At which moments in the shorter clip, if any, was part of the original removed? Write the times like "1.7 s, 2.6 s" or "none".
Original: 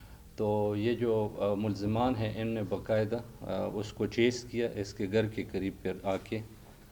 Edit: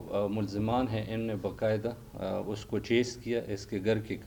none

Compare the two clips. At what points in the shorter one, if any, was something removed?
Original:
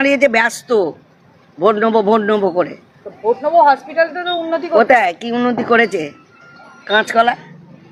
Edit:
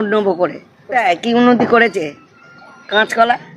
1.0 s

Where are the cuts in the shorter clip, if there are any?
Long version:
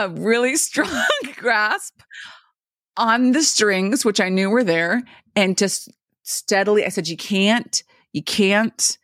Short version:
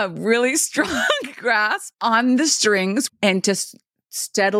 1.9 s, 3.1 s

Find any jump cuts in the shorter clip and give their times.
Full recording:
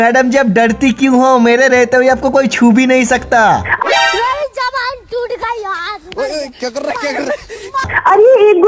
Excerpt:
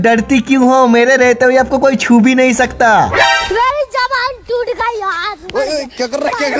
3.4 s

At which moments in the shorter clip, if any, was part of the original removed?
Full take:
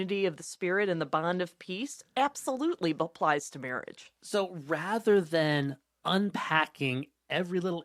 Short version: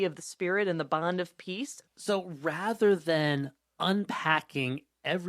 1.8 s

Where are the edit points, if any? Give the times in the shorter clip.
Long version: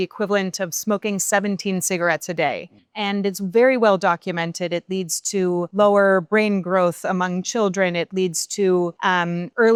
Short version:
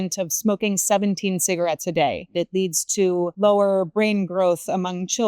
2.2 s

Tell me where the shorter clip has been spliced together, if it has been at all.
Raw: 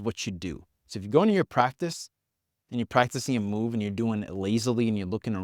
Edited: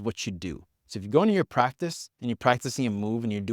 2.1 s

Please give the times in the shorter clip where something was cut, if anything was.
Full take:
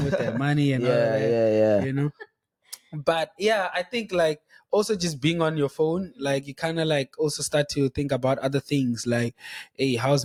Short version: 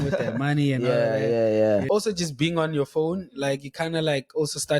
1.8 s

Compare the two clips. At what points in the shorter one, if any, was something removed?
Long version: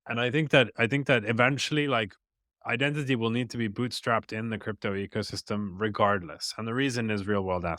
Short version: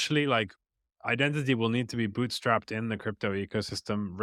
none

